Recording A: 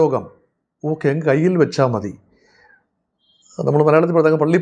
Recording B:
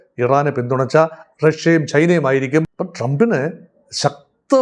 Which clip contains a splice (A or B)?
B